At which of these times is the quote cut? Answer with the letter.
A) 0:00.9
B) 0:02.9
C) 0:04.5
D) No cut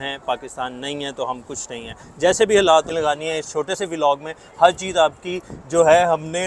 B